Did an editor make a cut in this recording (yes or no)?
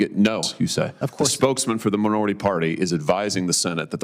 yes